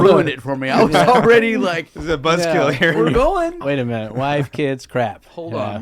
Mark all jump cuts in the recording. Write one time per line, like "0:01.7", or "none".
0:03.6